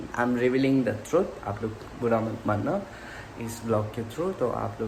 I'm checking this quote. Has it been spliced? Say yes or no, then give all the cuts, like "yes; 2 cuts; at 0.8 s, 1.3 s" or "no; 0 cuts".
no; 0 cuts